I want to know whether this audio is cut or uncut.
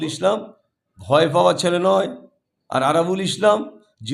uncut